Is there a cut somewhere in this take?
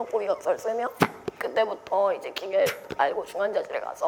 no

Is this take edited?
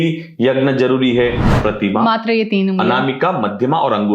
yes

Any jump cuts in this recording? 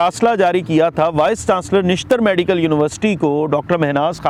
no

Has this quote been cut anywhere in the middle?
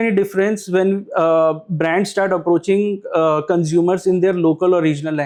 no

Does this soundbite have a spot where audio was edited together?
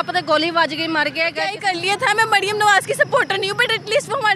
yes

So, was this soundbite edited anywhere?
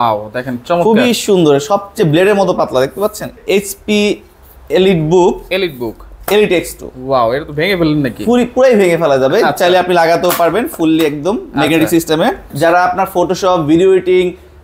yes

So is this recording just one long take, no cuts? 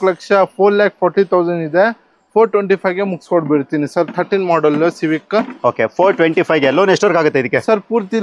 yes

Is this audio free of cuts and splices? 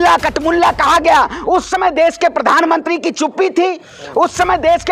yes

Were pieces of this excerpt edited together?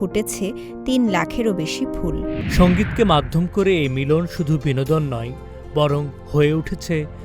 yes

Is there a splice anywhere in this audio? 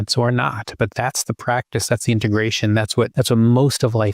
yes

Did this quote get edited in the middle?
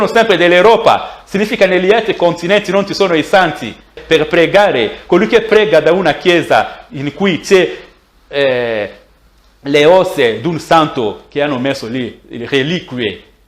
yes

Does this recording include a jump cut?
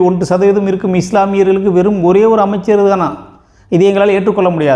no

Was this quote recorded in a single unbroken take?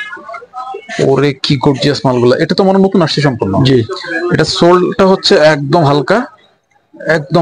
yes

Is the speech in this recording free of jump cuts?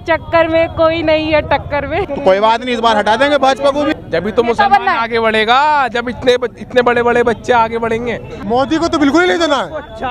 no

